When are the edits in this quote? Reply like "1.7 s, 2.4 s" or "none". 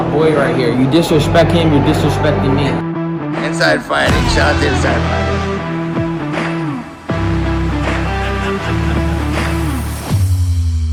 none